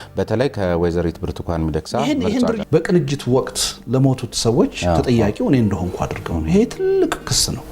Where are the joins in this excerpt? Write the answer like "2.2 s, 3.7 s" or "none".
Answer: 2.6 s